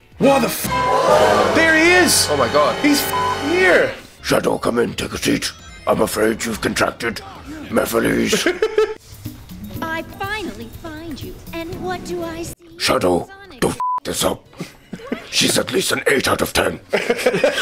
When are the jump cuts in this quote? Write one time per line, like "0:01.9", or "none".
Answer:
0:04.1
0:08.9